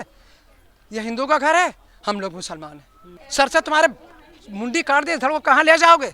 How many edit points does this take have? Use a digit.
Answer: 1